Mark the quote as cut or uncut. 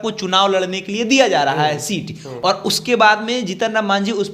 uncut